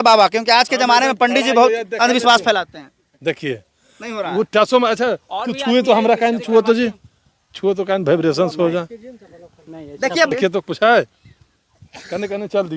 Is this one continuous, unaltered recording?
no; 1 cut; at 10.3 s

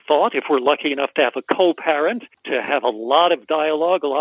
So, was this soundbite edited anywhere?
yes; 1 cut; at 2.3 s

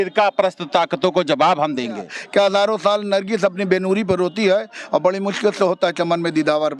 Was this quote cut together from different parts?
yes; 1 cut; at 2.2 s

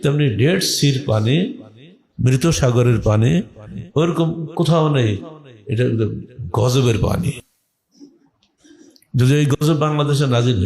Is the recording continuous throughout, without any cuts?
yes; 0 cuts

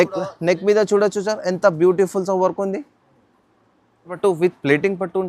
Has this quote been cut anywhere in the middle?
yes; 1 cut; at 4.1 s

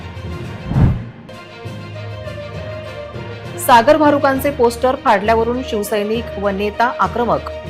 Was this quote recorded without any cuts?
no; 2 cuts; at 1.2 s, 3.6 s

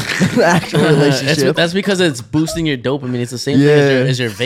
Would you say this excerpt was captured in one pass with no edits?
yes; 0 cuts

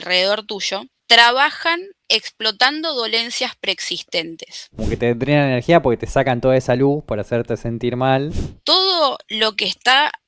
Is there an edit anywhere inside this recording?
yes; 3 cuts; at 0.9 s, 4.8 s, 8.5 s

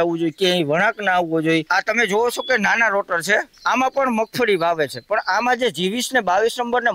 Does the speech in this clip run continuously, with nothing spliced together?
no; 2 cuts; at 1.7 s, 3.5 s

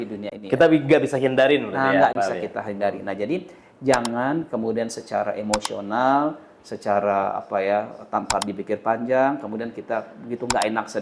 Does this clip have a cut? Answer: no; 0 cuts

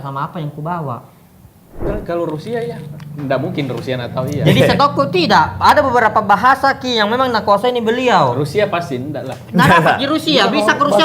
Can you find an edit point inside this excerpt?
yes; 1 cut; at 1.9 s

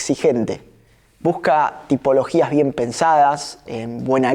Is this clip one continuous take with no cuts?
yes; 0 cuts

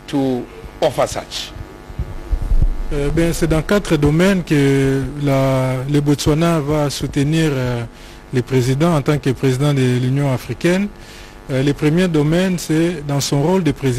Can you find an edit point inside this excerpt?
no; 0 cuts

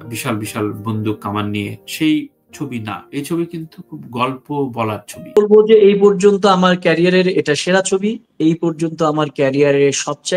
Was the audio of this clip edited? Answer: yes; 1 cut; at 5.1 s

